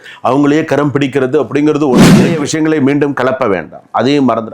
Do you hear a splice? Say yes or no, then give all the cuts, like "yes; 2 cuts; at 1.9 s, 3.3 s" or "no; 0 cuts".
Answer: yes; 1 cut; at 2.4 s